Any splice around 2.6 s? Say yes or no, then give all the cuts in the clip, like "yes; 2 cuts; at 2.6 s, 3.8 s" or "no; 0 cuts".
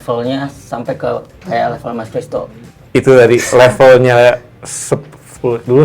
yes; 1 cut; at 2.6 s